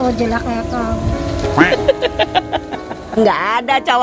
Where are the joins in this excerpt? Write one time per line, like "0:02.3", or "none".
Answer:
0:03.1